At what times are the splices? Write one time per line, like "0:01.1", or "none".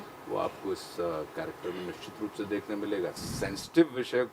0:03.2